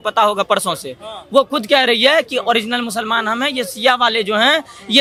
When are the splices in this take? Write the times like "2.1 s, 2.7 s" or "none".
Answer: none